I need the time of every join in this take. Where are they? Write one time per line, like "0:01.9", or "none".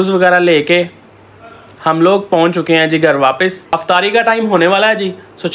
none